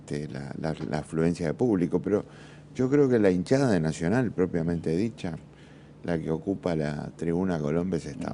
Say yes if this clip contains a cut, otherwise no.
yes